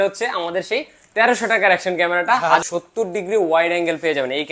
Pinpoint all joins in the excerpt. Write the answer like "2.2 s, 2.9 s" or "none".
2.6 s

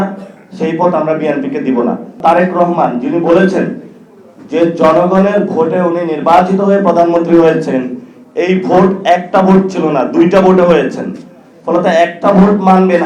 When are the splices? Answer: 2.2 s

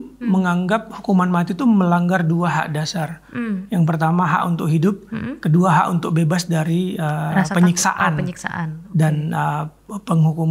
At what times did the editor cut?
none

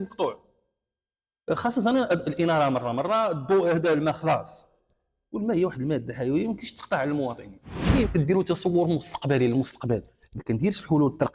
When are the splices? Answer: 8.1 s

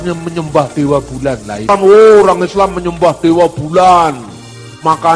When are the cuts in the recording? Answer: 1.7 s

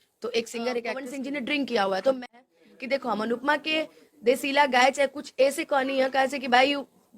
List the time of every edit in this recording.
1.0 s, 2.3 s

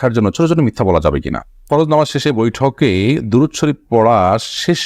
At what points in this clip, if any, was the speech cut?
1.5 s

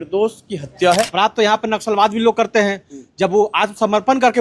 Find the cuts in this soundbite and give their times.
1.1 s

